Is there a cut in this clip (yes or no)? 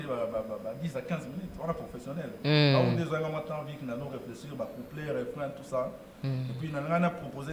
no